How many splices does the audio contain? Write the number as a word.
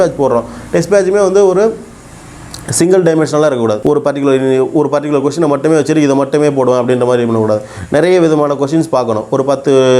zero